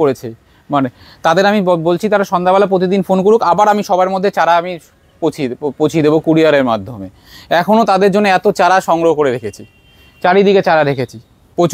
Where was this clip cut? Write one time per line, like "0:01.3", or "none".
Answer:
none